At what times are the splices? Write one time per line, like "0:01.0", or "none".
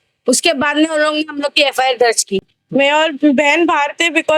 0:02.6

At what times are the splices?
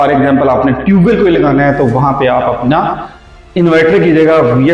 none

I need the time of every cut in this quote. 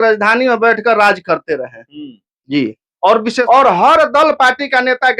0:03.4

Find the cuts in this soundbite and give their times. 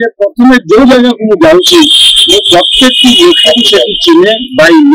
none

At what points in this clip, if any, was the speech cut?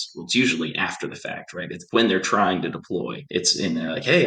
0:01.8
0:03.2

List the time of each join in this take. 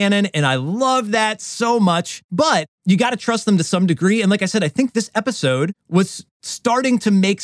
0:02.5
0:06.0

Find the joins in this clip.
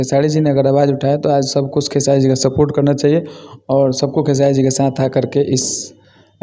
none

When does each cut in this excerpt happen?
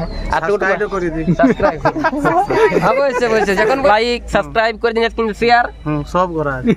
0:03.9

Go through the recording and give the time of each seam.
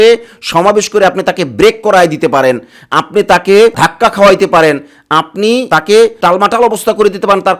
none

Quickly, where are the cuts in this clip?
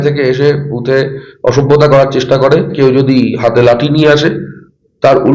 0:02.8

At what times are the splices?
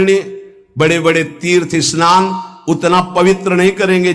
none

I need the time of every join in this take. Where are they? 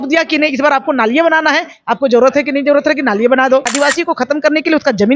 0:03.7

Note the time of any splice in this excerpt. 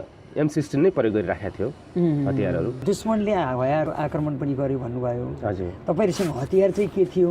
none

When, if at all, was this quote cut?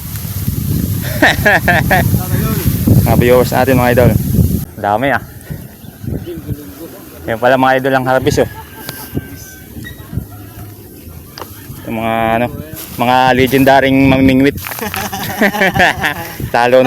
0:04.6

